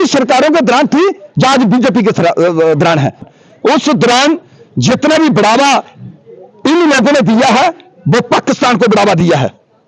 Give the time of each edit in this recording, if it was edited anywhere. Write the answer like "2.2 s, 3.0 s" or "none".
3.3 s